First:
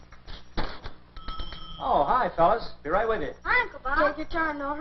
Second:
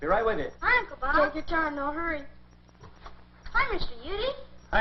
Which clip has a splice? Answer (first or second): second